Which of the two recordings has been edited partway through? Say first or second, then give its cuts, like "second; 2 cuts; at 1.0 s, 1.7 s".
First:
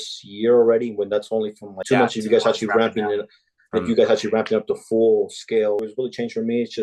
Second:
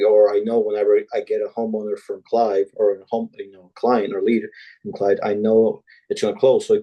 first; 2 cuts; at 1.8 s, 5.8 s